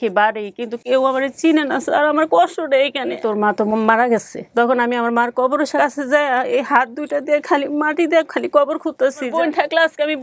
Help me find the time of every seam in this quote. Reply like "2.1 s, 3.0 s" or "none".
3.2 s, 5.7 s, 9.2 s